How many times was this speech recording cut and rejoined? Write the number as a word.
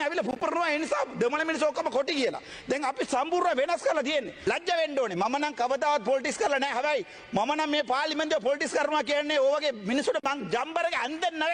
one